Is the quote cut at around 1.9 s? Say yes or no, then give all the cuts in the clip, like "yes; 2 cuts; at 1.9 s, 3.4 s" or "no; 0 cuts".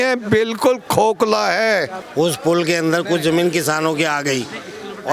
no; 0 cuts